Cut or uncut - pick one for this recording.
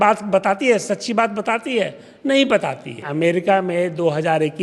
cut